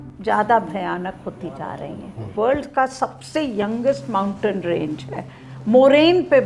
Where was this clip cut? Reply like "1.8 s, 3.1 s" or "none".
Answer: 2.3 s